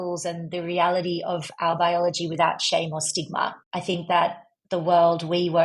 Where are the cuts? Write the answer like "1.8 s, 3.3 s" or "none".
3.6 s